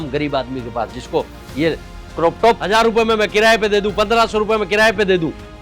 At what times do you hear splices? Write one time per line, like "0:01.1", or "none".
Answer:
0:02.6